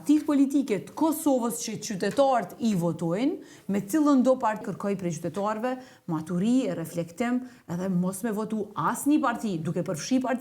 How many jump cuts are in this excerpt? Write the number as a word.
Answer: one